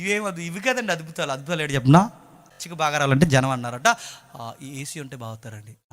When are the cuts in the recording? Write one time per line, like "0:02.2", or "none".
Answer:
0:02.6